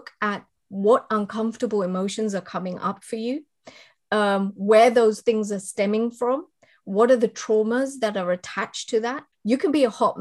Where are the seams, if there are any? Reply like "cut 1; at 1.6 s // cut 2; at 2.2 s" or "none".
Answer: cut 1; at 9.3 s

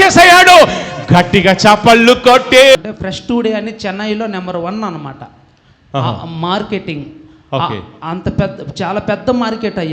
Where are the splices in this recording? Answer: cut 1; at 2.8 s

